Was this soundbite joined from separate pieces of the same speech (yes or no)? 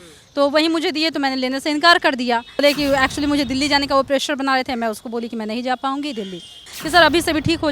yes